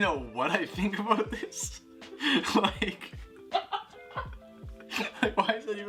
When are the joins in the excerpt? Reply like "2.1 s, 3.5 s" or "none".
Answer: none